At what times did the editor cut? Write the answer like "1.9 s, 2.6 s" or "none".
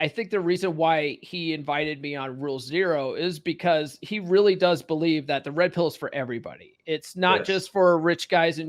none